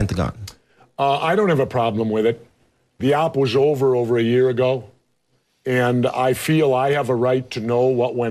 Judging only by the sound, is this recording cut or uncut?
cut